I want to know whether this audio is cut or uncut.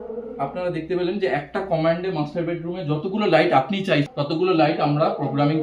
cut